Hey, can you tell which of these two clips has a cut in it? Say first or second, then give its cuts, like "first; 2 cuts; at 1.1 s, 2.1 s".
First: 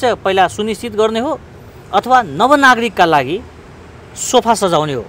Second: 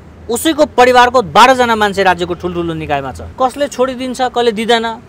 second; 1 cut; at 3.2 s